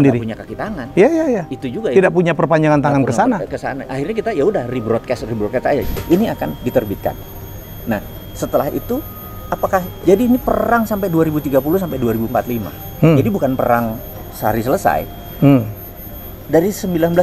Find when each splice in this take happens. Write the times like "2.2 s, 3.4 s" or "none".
5.8 s